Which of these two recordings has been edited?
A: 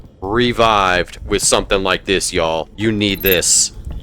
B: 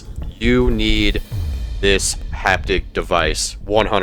A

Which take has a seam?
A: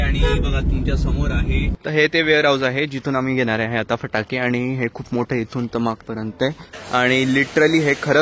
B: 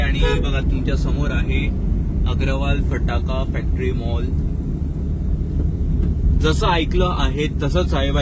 A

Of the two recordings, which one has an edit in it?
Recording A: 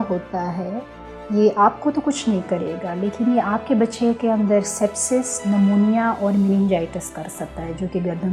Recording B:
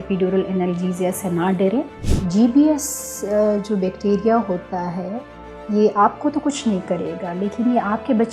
B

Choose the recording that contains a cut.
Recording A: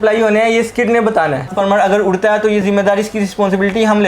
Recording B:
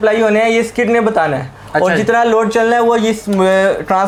A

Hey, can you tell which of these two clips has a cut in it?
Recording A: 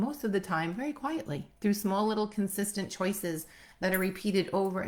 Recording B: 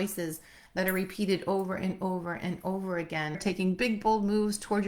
B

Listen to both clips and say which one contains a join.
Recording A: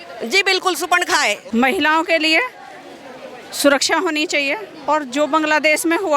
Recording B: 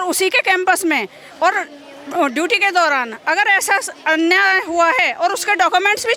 A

